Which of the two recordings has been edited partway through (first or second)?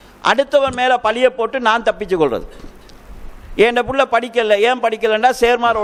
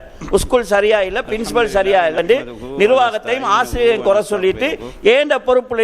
second